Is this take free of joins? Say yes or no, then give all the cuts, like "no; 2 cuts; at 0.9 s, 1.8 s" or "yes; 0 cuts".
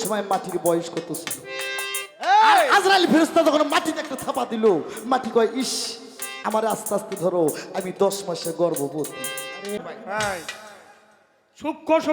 no; 1 cut; at 9.8 s